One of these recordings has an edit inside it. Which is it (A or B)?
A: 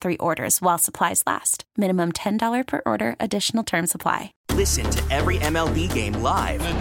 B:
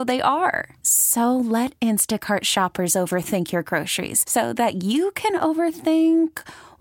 A